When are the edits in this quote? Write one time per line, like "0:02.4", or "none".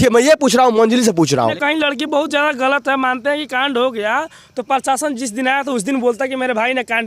0:01.3